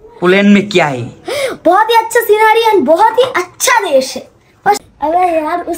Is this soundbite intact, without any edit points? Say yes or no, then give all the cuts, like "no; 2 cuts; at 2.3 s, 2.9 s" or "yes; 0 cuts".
no; 1 cut; at 4.8 s